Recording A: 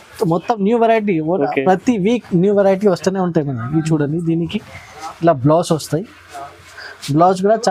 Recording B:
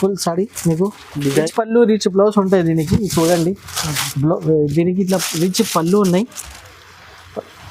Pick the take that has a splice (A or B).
B